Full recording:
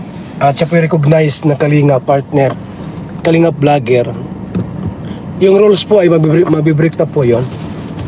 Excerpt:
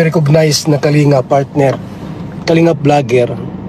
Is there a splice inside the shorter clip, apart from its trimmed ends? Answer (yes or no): no